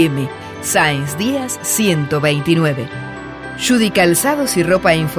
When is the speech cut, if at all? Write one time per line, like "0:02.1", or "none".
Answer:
none